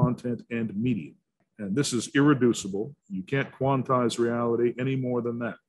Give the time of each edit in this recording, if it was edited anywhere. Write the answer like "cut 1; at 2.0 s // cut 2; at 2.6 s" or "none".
cut 1; at 1.5 s